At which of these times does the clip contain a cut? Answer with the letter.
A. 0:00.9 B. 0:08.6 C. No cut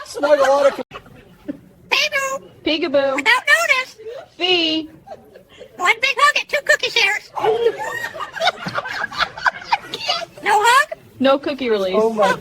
A